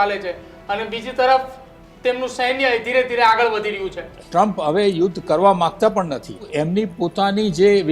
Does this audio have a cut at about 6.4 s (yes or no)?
yes